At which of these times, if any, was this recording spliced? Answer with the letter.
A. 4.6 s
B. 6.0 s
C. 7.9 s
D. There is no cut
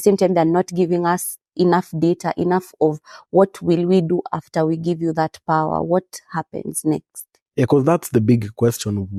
D